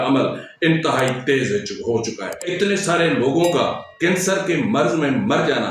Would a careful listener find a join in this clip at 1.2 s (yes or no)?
no